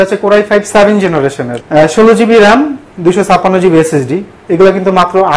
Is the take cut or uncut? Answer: cut